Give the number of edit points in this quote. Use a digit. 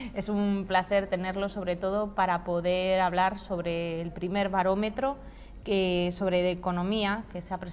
1